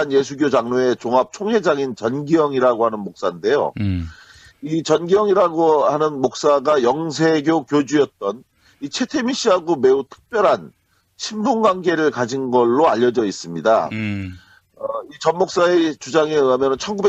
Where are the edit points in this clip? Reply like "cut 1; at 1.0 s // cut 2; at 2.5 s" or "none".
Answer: cut 1; at 9.3 s